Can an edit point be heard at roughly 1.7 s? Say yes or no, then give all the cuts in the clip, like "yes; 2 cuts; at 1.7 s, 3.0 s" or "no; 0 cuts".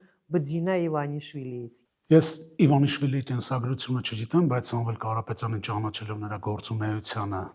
yes; 1 cut; at 1.7 s